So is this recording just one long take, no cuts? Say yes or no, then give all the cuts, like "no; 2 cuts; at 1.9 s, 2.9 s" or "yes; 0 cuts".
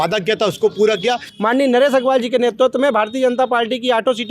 no; 1 cut; at 1.3 s